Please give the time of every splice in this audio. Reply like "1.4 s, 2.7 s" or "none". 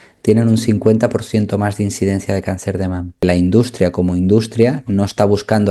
3.2 s